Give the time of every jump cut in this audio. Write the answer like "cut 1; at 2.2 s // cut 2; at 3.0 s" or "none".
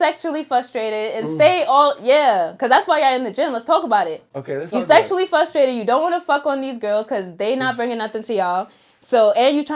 none